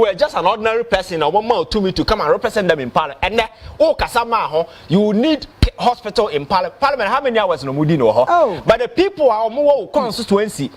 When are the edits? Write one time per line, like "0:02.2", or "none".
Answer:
none